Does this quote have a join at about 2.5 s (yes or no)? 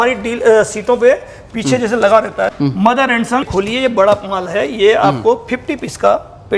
yes